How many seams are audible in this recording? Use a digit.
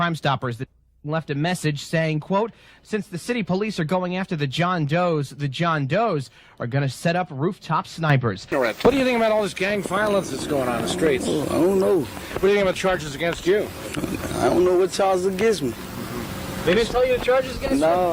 1